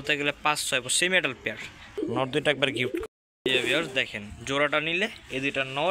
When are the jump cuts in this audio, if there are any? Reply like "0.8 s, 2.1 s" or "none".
2.0 s